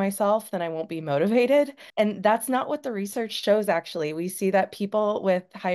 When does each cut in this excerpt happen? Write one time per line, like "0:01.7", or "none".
0:01.8